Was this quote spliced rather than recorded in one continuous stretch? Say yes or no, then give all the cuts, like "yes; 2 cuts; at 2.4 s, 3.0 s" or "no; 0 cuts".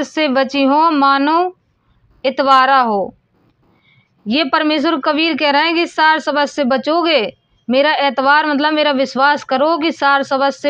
no; 0 cuts